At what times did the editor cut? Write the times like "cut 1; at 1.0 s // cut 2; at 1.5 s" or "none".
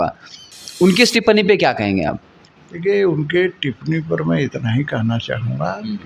none